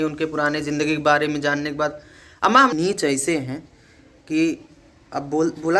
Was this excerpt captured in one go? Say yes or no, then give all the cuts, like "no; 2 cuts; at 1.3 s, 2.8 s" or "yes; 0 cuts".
no; 1 cut; at 2.7 s